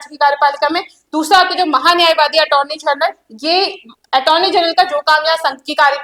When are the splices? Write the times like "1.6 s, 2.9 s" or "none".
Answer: none